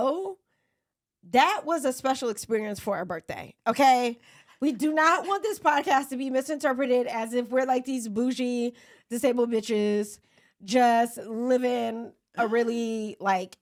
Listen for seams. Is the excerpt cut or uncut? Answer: uncut